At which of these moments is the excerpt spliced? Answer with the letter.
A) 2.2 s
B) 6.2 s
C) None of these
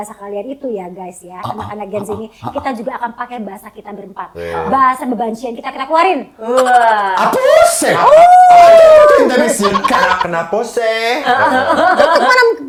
C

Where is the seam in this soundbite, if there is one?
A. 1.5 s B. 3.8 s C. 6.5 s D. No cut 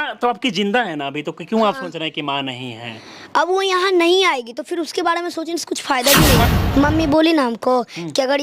C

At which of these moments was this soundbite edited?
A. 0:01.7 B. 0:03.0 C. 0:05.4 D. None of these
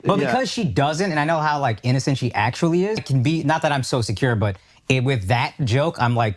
B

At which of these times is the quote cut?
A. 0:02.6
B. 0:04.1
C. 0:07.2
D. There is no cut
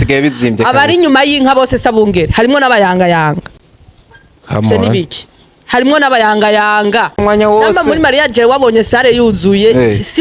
C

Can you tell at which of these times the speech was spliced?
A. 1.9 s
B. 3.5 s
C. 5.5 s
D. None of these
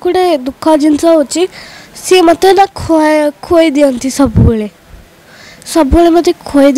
D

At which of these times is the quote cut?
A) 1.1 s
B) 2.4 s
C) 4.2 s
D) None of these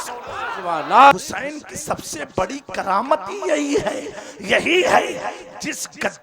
A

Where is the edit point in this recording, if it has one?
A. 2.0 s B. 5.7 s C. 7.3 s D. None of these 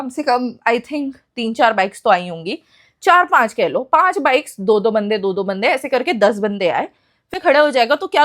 C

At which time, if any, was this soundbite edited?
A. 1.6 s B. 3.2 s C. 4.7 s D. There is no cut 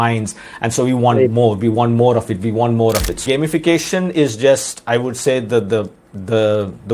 B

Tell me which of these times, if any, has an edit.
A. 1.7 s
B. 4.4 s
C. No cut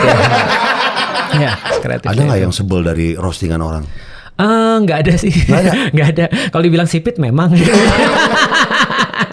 A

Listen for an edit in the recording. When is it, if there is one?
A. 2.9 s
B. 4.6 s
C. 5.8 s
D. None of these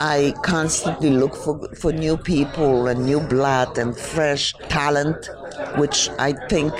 B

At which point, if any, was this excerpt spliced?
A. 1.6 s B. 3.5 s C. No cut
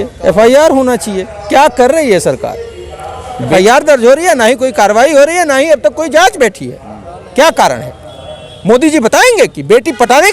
B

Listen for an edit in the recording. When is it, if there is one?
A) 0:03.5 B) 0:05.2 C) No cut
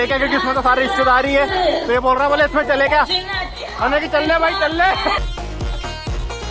B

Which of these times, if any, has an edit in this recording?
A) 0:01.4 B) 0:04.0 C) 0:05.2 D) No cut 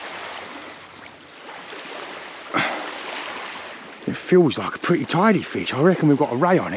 A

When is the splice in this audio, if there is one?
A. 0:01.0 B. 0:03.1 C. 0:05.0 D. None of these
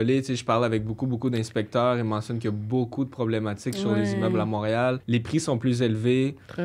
C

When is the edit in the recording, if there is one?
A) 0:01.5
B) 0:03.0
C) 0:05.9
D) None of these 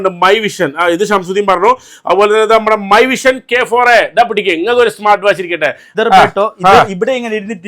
C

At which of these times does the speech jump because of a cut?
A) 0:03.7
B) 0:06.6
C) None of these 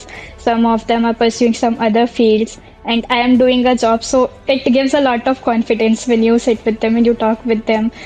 C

